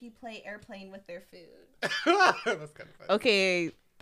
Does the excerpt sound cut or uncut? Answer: uncut